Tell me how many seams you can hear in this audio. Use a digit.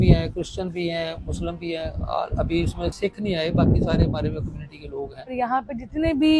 2